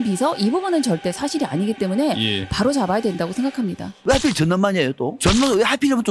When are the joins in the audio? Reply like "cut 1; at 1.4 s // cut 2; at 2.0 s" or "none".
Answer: cut 1; at 4.0 s